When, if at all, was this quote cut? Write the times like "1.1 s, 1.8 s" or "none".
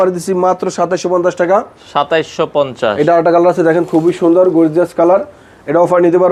none